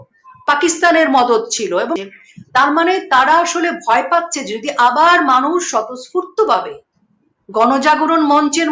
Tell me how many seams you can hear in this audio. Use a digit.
1